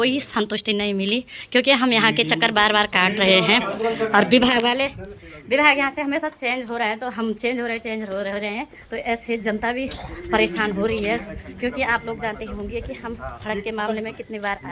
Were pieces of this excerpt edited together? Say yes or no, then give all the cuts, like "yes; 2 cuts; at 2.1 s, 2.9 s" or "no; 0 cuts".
no; 0 cuts